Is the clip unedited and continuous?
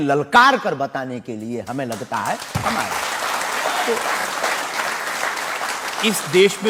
yes; 0 cuts

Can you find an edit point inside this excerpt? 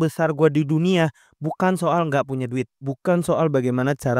yes; 1 cut; at 2.8 s

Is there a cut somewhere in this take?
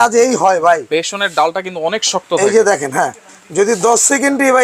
no; 0 cuts

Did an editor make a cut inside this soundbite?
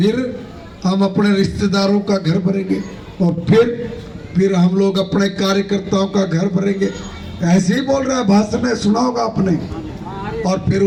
no; 0 cuts

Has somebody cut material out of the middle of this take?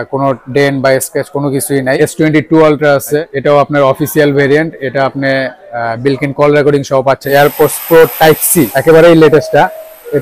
yes; 4 cuts; at 2.0 s, 3.3 s, 7.2 s, 8.7 s

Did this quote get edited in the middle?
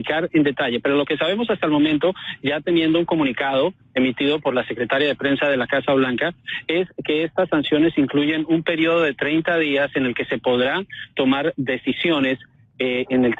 no; 0 cuts

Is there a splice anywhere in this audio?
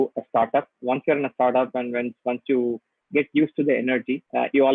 no; 0 cuts

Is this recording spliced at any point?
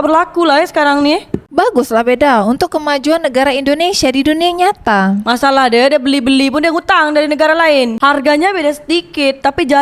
yes; 2 cuts; at 1.5 s, 7.9 s

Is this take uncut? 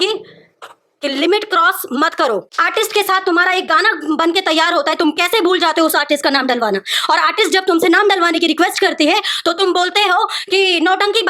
no; 1 cut; at 2.5 s

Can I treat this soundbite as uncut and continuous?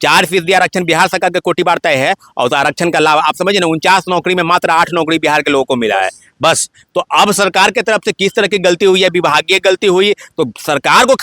yes; 0 cuts

